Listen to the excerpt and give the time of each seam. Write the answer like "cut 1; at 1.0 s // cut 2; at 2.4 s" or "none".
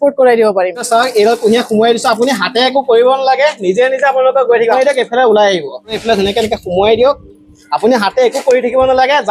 cut 1; at 0.8 s // cut 2; at 4.8 s // cut 3; at 6.0 s